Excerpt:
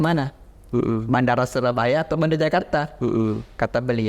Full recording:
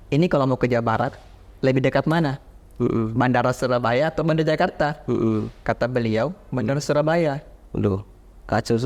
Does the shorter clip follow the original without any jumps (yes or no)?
yes